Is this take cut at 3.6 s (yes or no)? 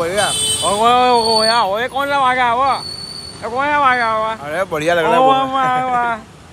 no